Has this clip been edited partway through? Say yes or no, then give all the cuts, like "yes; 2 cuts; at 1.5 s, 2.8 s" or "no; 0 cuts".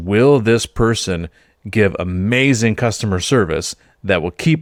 no; 0 cuts